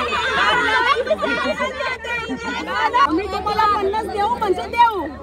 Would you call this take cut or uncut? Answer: cut